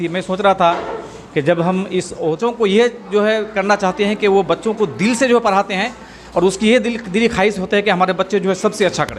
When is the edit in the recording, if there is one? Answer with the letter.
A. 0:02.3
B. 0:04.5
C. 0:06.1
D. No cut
A